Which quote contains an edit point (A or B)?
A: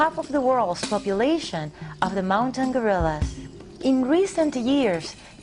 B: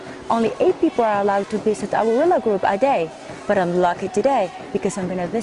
B